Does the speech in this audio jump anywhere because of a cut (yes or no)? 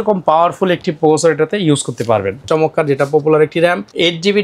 yes